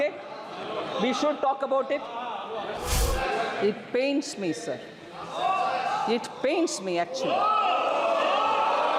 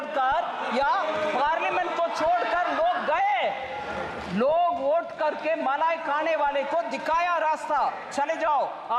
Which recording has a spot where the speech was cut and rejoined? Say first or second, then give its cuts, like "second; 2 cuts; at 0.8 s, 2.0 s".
first; 1 cut; at 2.8 s